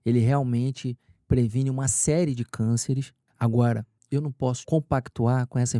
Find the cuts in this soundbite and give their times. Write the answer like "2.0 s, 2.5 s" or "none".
3.2 s, 4.4 s